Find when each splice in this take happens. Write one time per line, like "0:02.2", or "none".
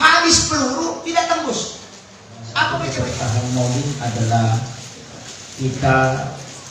0:02.9